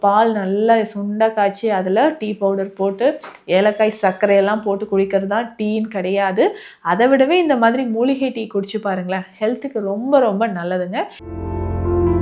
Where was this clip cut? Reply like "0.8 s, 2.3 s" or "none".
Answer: 11.2 s